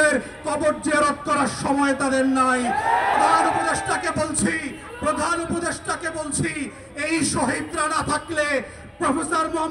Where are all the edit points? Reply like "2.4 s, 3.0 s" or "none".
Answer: 3.1 s